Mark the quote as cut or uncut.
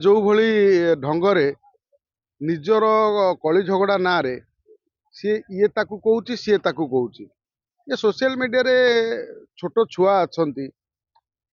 uncut